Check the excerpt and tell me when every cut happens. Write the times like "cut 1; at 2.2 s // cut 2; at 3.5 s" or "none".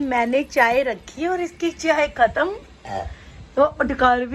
none